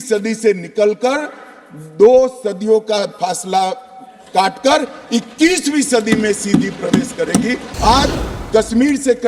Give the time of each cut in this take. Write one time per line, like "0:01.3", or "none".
0:07.6